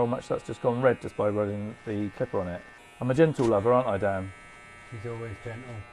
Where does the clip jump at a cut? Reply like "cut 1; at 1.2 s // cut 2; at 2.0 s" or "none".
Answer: cut 1; at 2.8 s